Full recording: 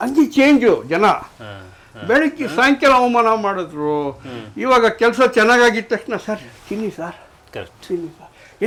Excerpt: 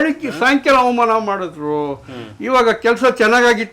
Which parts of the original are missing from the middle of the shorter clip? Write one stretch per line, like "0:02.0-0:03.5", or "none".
none

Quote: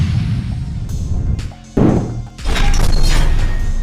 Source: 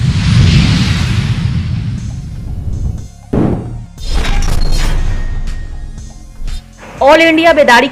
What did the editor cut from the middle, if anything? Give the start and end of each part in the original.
0:03.9-0:04.0

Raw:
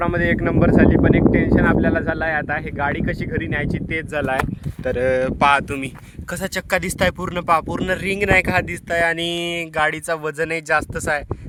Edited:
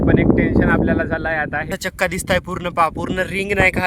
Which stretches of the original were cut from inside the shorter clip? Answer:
0:02.7-0:06.4

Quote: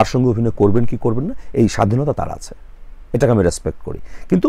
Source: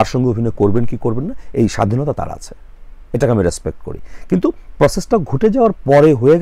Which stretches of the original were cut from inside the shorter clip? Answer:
none

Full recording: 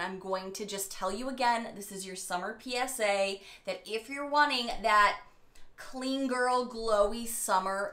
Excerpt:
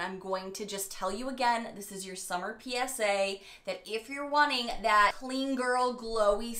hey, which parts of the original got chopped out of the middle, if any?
0:05.2-0:05.9

